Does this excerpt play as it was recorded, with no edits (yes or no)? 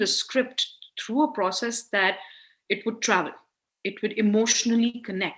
yes